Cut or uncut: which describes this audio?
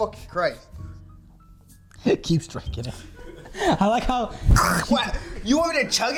uncut